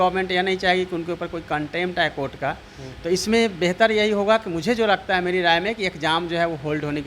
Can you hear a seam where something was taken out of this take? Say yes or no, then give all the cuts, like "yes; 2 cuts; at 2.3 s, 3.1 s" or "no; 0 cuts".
no; 0 cuts